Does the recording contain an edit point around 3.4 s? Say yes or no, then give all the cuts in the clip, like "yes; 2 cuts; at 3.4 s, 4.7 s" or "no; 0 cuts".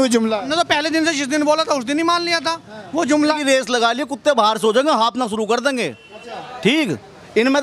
yes; 1 cut; at 3.4 s